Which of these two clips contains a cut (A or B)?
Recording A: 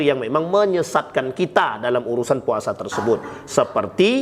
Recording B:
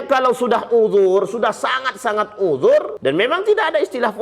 B